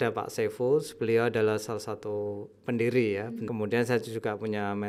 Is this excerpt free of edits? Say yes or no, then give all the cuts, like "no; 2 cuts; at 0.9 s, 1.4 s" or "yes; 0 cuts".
no; 1 cut; at 3.2 s